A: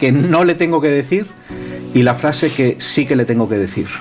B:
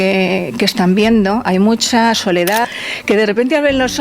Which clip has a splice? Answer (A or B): B